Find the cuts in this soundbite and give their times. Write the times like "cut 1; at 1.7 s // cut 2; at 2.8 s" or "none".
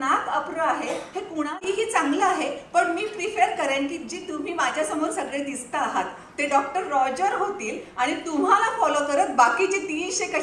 cut 1; at 1.6 s